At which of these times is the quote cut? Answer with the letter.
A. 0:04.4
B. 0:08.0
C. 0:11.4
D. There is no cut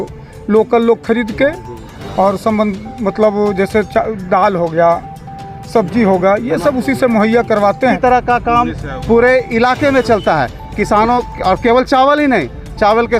B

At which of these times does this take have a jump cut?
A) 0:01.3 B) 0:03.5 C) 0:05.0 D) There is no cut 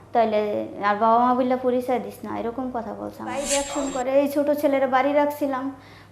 B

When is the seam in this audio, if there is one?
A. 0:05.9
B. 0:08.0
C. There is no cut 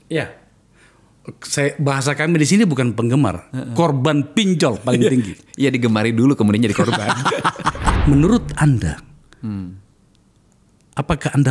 B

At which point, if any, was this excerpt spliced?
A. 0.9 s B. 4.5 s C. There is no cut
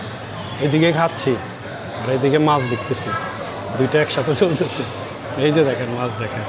C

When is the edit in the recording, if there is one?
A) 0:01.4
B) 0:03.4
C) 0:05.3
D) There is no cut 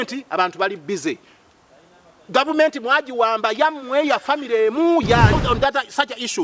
C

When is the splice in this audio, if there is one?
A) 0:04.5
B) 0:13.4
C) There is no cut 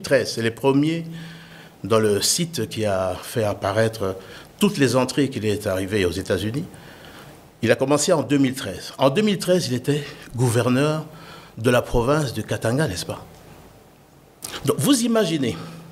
C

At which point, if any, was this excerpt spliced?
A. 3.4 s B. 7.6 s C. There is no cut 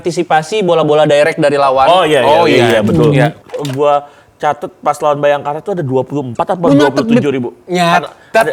A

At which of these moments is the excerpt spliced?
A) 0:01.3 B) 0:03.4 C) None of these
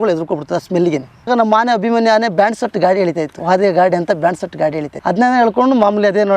A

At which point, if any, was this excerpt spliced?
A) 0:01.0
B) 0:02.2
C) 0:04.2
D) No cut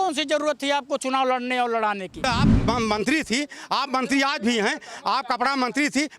B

